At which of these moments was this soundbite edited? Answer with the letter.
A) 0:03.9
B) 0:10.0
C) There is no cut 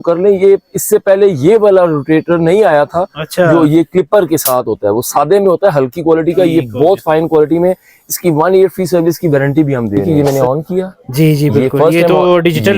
B